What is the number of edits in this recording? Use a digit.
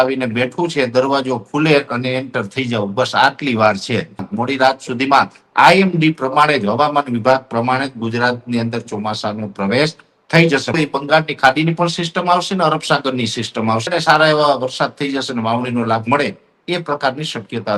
3